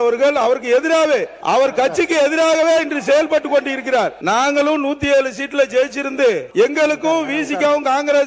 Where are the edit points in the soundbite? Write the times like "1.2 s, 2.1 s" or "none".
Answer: 1.3 s, 4.2 s, 6.4 s